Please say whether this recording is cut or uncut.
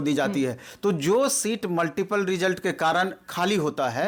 uncut